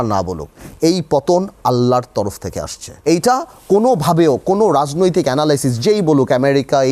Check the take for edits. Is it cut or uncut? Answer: cut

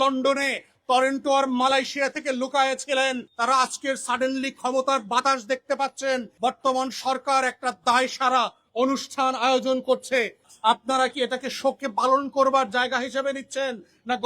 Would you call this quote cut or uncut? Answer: cut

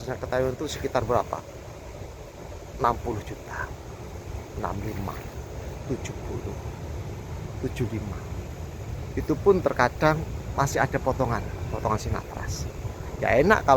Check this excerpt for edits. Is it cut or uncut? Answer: uncut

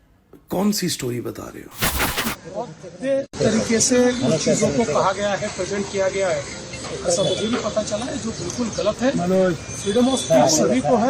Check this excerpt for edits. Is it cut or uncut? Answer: cut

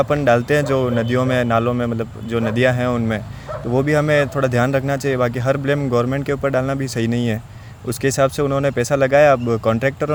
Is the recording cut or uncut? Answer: uncut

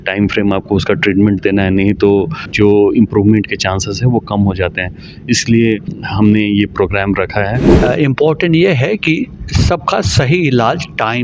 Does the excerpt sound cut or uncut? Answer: cut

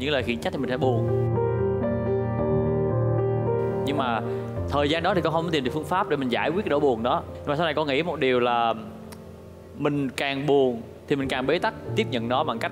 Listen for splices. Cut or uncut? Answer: uncut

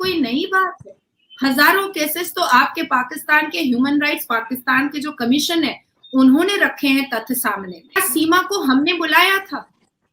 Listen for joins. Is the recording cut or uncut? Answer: cut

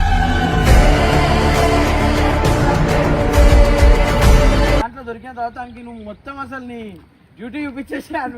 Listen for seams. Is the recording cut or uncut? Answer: cut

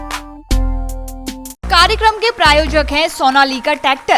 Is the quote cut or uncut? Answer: cut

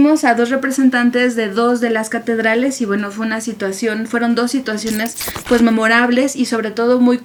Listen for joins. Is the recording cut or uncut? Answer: uncut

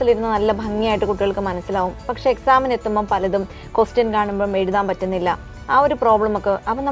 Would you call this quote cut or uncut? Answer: uncut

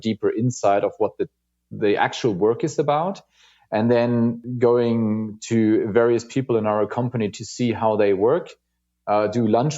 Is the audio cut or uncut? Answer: cut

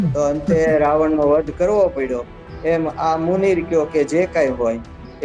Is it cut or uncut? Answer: uncut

